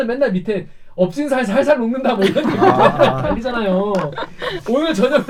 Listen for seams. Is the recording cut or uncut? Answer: uncut